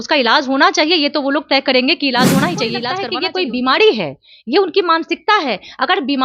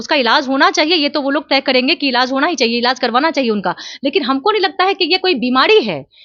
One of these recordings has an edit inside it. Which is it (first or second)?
first